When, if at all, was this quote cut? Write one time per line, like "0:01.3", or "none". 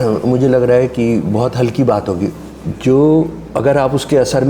0:02.3